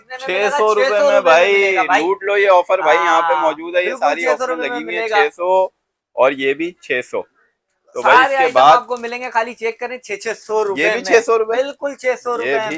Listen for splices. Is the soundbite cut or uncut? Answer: uncut